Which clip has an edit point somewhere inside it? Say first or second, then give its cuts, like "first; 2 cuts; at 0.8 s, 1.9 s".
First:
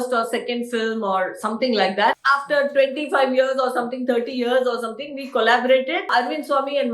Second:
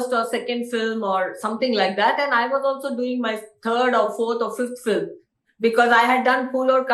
first; 2 cuts; at 2.2 s, 6.0 s